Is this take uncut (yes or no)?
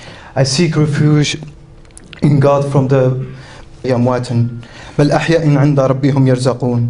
yes